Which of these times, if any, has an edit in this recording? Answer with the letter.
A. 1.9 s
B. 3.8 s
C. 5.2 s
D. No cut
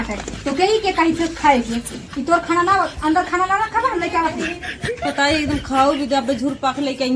D